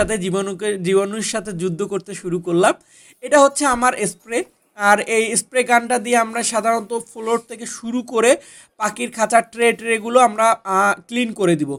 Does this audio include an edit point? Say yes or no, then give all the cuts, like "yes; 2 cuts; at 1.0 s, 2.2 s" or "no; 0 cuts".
no; 0 cuts